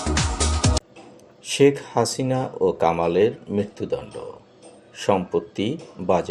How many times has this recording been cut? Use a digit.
1